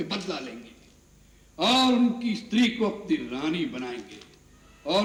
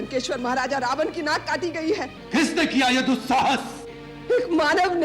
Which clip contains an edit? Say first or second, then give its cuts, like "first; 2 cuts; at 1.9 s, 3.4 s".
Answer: second; 1 cut; at 2.1 s